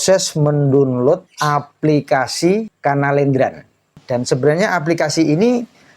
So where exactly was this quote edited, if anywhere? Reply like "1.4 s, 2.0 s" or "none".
1.3 s, 2.7 s, 3.9 s